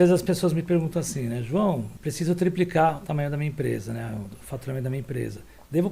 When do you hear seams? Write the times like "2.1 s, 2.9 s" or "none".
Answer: 2.0 s